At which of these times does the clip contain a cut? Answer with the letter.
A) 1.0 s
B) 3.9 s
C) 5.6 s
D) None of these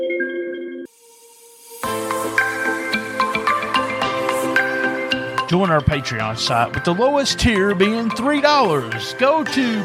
A